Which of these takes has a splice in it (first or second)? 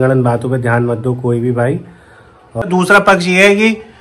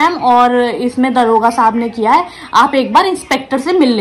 first